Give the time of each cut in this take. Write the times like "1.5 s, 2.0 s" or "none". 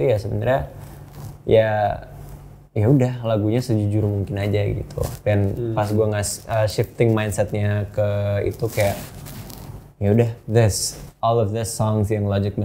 none